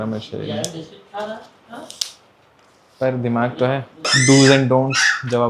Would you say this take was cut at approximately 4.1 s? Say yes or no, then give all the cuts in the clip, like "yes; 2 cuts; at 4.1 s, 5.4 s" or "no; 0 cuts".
yes; 1 cut; at 4.1 s